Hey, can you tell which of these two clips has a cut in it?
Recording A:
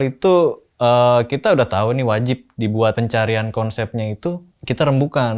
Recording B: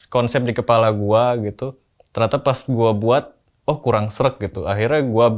A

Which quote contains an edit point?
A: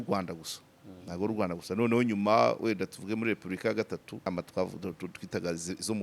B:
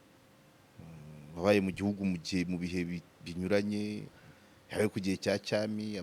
A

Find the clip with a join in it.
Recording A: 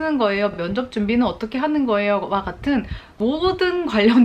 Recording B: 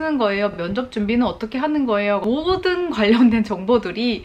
B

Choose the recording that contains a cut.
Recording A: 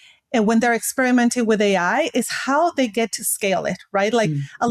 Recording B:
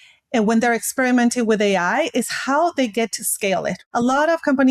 B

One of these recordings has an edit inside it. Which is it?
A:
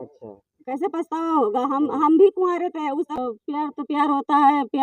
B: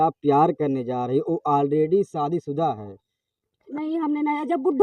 A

